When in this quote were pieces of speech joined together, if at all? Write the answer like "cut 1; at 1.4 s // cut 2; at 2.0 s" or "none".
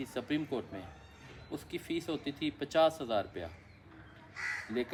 none